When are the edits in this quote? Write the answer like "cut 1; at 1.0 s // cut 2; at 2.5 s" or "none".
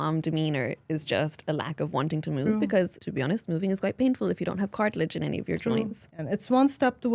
cut 1; at 3.0 s // cut 2; at 6.0 s